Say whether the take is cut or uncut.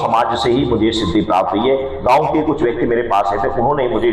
uncut